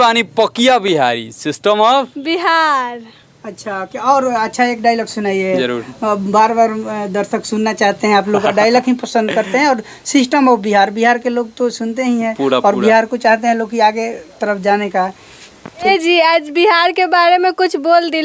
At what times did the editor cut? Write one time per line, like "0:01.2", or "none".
none